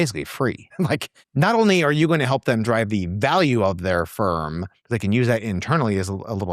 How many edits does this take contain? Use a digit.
1